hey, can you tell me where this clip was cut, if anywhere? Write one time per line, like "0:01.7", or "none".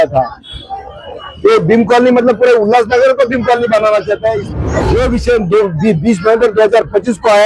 0:04.4